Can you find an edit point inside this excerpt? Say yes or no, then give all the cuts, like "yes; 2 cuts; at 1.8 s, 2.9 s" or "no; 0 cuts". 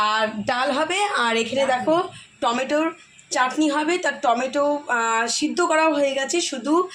no; 0 cuts